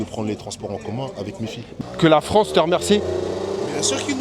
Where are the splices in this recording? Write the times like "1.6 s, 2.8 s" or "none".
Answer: 1.8 s